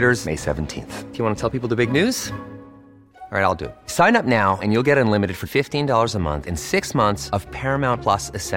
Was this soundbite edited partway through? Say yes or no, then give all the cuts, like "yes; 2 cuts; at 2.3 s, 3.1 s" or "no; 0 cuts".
no; 0 cuts